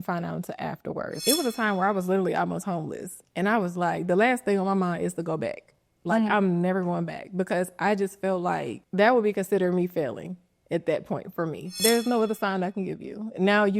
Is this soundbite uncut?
no; 3 cuts; at 1.2 s, 8.8 s, 11.7 s

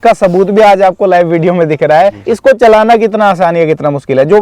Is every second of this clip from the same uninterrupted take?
no; 1 cut; at 2.3 s

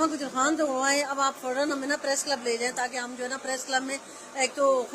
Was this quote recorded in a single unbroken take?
yes; 0 cuts

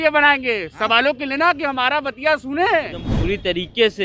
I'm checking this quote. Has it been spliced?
yes; 1 cut; at 3.1 s

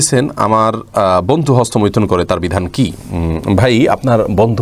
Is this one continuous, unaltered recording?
yes; 0 cuts

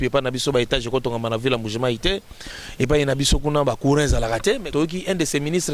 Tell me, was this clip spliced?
yes; 1 cut; at 4.7 s

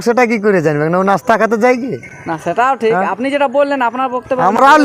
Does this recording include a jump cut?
no; 0 cuts

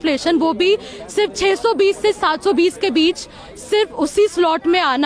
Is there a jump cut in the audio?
no; 0 cuts

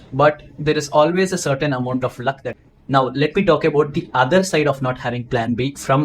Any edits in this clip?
yes; 1 cut; at 2.5 s

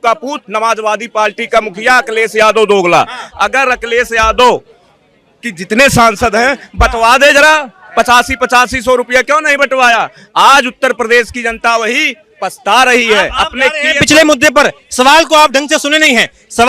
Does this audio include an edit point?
no; 0 cuts

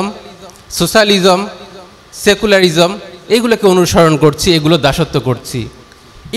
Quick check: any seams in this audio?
no; 0 cuts

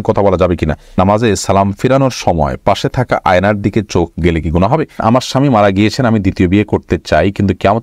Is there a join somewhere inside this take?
yes; 2 cuts; at 1.0 s, 5.0 s

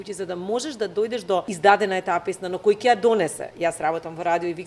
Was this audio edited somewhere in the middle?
yes; 1 cut; at 1.5 s

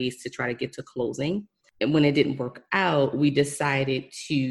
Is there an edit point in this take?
yes; 1 cut; at 1.6 s

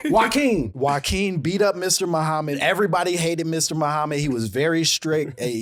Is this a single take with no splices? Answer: yes; 0 cuts

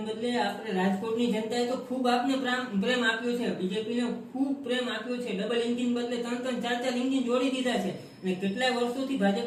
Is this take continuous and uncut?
yes; 0 cuts

